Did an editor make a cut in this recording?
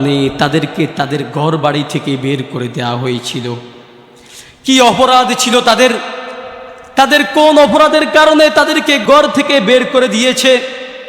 yes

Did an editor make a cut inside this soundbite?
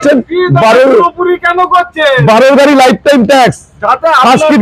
no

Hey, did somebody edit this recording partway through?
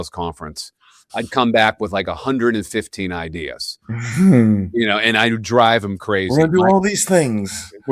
no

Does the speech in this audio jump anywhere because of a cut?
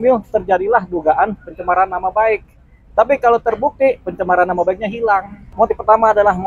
yes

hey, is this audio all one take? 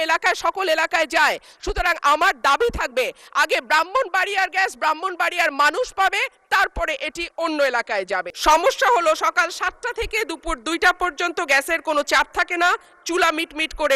no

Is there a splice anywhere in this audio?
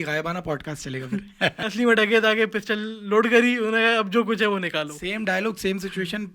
yes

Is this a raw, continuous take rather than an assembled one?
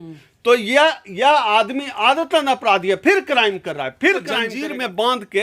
no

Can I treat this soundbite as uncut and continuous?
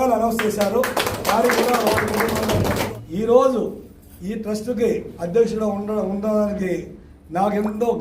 no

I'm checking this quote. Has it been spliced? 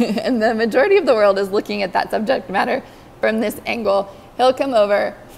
no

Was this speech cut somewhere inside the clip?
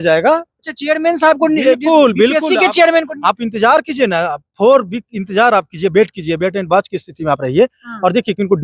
no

